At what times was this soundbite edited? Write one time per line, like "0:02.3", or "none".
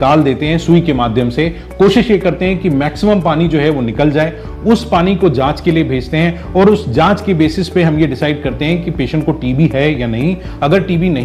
none